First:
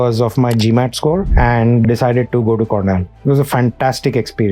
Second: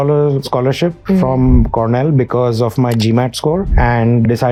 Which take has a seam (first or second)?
first